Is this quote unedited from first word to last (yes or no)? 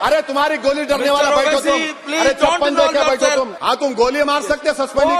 no